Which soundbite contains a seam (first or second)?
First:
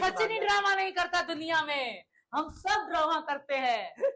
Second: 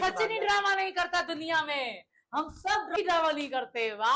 second